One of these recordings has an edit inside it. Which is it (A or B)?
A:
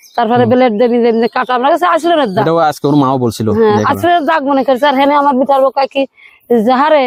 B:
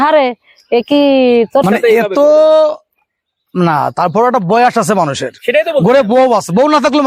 B